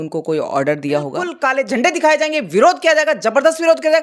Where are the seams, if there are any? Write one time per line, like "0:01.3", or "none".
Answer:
0:01.3